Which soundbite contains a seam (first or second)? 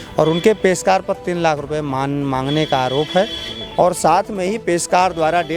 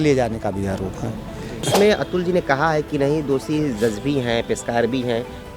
second